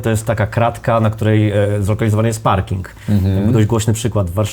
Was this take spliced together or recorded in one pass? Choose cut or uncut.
uncut